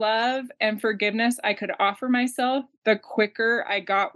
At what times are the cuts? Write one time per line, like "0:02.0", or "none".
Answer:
0:02.7